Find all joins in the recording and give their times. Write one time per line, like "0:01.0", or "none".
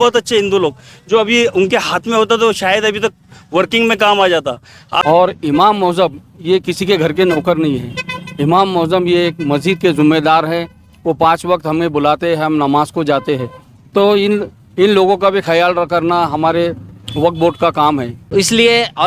0:05.0
0:18.2